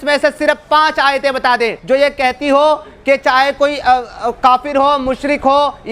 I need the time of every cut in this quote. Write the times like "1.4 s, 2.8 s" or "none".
1.8 s